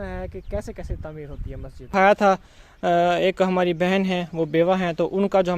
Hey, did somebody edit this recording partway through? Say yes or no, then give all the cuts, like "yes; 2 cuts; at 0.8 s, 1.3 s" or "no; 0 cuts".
yes; 1 cut; at 1.9 s